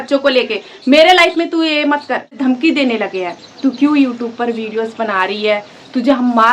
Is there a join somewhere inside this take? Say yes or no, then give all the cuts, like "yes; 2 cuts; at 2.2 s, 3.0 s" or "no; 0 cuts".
yes; 1 cut; at 2.3 s